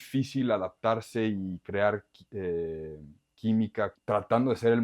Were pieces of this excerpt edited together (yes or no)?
yes